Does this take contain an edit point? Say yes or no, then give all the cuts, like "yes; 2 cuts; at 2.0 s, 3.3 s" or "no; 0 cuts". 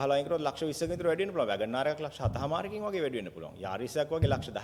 no; 0 cuts